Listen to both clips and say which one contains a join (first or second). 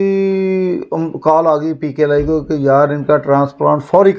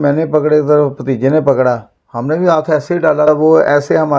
second